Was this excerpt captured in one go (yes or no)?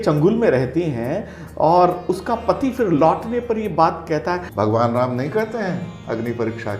no